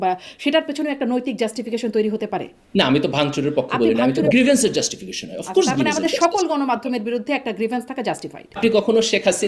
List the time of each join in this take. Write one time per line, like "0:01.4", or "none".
0:02.6
0:04.3
0:08.5